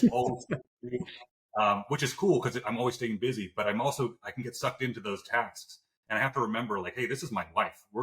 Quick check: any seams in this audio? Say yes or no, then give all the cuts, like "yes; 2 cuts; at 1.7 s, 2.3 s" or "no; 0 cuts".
no; 0 cuts